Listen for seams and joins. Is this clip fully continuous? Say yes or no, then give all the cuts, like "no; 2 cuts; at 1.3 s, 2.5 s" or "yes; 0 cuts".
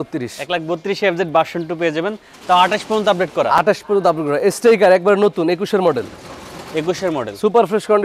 yes; 0 cuts